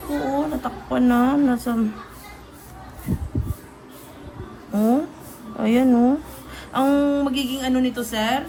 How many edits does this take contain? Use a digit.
0